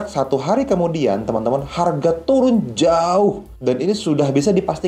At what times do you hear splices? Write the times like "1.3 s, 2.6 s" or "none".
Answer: 3.5 s